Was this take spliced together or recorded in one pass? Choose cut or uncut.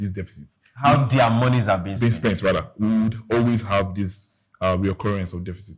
uncut